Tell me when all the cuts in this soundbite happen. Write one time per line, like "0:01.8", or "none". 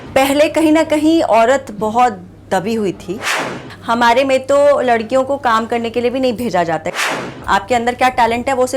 0:03.6
0:07.1